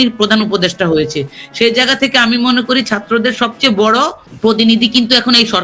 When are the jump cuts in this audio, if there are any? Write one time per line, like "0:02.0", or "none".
0:04.2